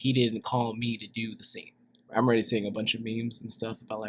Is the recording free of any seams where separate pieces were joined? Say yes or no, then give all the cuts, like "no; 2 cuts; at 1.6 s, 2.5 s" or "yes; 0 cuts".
no; 1 cut; at 2.1 s